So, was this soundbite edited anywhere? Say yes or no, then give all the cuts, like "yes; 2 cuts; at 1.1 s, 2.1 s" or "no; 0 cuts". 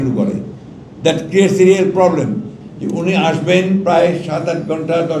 yes; 1 cut; at 2.7 s